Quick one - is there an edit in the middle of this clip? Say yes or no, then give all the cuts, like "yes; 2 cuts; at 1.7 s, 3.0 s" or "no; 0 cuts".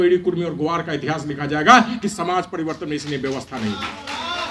no; 0 cuts